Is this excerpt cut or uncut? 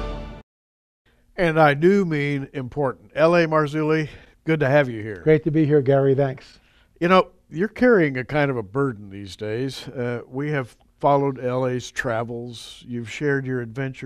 uncut